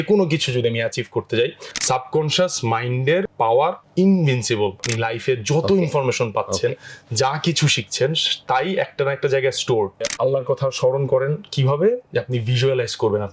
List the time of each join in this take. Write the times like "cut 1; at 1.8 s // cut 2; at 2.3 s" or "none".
cut 1; at 1.7 s // cut 2; at 3.4 s // cut 3; at 4.8 s // cut 4; at 10.1 s